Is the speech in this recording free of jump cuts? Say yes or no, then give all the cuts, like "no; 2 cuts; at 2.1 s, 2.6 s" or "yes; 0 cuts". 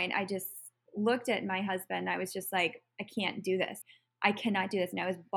no; 1 cut; at 3.8 s